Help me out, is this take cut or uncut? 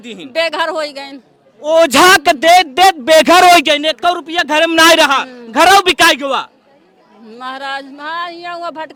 uncut